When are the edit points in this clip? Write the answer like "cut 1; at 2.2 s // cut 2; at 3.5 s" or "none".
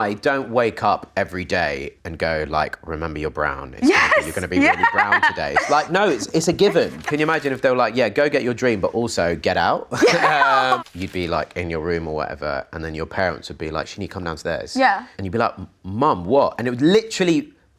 cut 1; at 2.0 s // cut 2; at 7.1 s // cut 3; at 10.8 s // cut 4; at 15.1 s